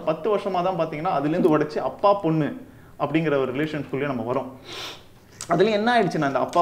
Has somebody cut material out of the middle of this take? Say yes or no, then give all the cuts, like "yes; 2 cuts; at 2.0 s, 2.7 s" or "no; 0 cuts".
no; 0 cuts